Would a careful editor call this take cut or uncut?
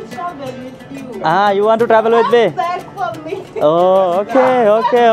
uncut